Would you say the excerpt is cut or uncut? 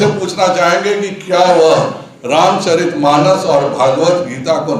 uncut